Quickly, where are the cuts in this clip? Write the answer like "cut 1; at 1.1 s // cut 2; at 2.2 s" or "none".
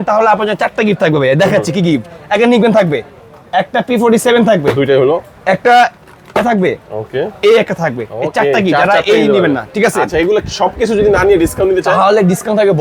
none